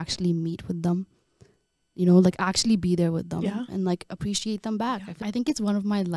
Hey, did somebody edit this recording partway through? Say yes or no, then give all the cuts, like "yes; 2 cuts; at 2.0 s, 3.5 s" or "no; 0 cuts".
yes; 1 cut; at 5.1 s